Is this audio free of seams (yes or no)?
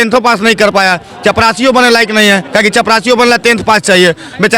yes